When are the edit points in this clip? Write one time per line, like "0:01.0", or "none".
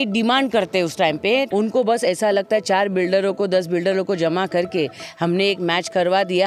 0:01.5